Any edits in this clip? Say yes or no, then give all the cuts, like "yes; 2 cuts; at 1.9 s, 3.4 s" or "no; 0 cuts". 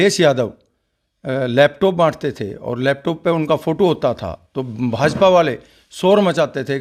no; 0 cuts